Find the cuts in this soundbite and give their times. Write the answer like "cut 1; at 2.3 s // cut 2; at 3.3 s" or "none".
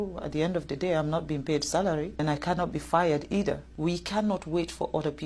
cut 1; at 2.2 s // cut 2; at 3.7 s